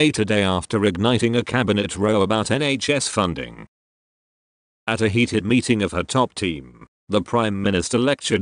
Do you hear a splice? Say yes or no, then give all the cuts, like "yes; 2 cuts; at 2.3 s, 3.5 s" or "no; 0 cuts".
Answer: no; 0 cuts